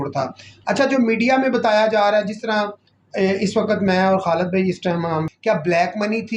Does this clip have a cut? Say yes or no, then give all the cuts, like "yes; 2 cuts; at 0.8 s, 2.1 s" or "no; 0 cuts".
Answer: yes; 1 cut; at 5.3 s